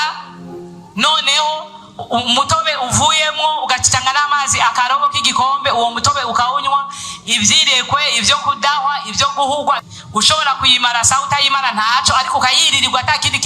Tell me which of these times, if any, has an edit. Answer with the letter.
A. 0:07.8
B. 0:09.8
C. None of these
B